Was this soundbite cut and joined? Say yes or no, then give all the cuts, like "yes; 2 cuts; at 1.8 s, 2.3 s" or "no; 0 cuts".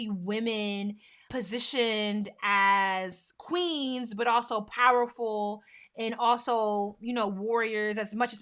yes; 1 cut; at 1.3 s